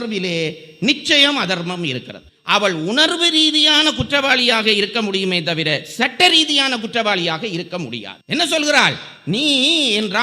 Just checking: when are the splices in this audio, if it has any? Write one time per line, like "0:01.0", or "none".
0:02.2
0:08.1